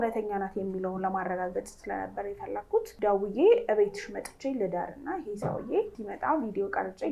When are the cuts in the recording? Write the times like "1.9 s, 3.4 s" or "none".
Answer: 2.9 s, 6.0 s

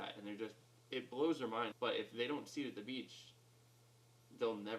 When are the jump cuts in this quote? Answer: 1.7 s

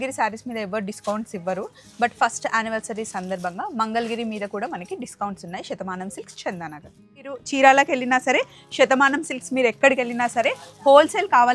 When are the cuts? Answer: 7.4 s

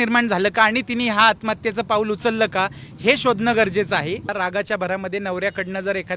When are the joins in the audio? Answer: 4.3 s

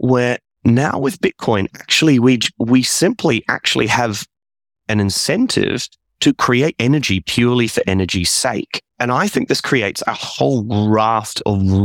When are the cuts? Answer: none

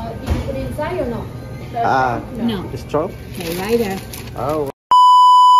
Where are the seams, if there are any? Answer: 4.7 s

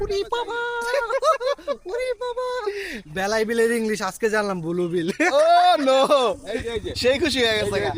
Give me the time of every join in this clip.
none

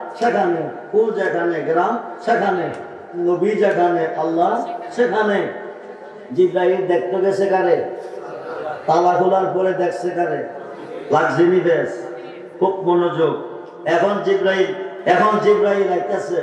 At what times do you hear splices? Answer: 14.9 s

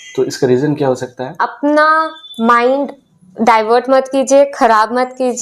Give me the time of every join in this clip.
1.6 s

